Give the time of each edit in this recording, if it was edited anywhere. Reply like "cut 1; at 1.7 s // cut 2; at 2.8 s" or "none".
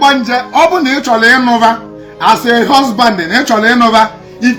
none

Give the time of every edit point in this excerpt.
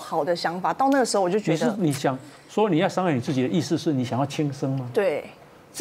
none

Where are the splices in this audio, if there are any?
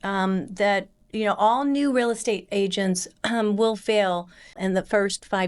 cut 1; at 4.6 s

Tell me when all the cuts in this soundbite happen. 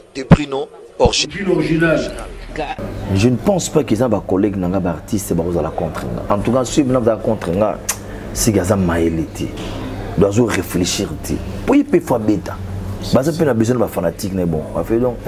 cut 1; at 2.7 s

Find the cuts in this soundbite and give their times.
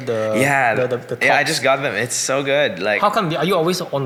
none

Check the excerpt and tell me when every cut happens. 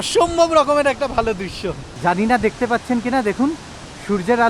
none

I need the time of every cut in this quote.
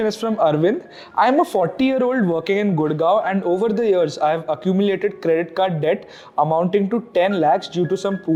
none

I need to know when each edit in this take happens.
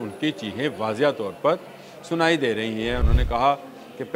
cut 1; at 3.0 s

